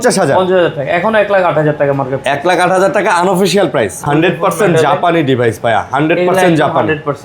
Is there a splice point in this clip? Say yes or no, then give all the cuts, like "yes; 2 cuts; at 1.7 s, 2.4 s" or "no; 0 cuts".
yes; 1 cut; at 4.0 s